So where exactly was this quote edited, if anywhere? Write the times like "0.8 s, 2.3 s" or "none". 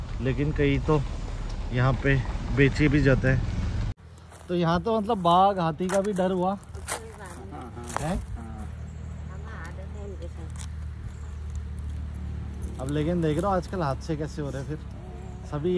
3.8 s